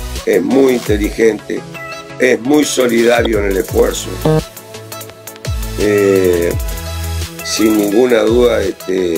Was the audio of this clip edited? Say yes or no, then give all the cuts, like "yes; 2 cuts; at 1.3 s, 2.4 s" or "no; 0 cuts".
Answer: no; 0 cuts